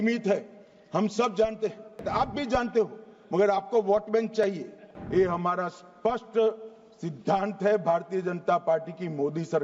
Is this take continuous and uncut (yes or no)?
no